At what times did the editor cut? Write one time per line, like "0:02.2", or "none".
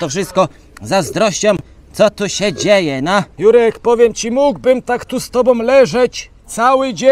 0:03.3